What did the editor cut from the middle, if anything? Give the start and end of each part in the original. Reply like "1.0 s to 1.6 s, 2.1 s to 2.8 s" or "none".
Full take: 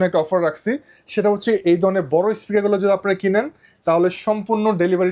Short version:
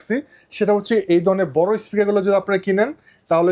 none